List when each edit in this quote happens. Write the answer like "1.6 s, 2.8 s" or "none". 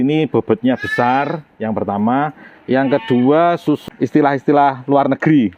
3.8 s